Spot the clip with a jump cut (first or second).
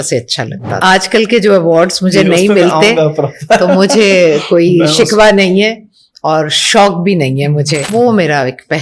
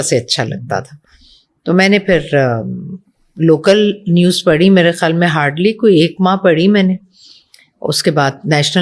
first